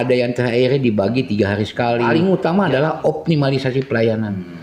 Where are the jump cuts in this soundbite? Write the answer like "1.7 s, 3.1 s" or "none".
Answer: 2.1 s